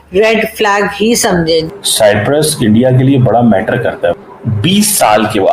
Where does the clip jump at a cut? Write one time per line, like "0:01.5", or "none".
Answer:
0:01.7
0:04.2